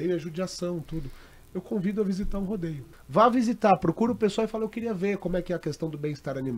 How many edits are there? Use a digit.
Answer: 1